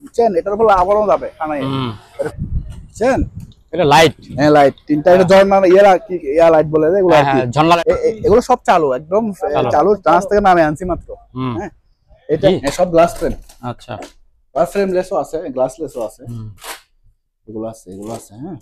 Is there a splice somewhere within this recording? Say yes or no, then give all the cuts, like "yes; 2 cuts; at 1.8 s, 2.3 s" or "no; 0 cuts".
yes; 3 cuts; at 2.3 s, 7.8 s, 12.5 s